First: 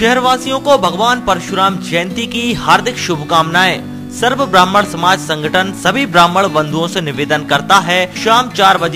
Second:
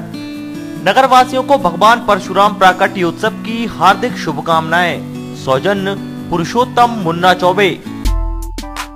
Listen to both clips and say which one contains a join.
second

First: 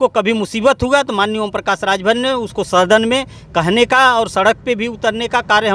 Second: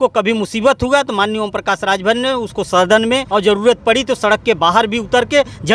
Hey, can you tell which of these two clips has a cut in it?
second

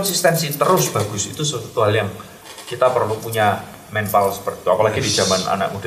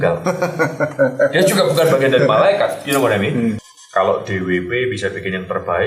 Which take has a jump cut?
second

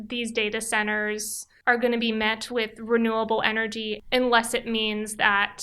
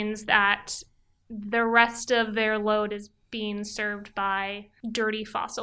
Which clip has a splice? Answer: first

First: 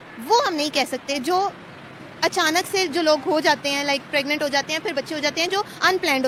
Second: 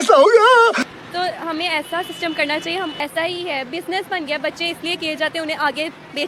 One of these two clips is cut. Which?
second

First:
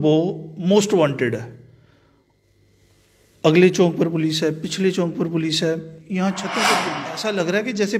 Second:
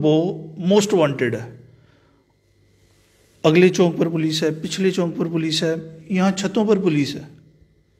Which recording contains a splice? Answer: first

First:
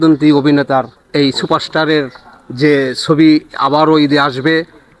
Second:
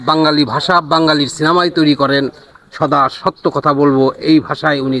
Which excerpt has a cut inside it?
first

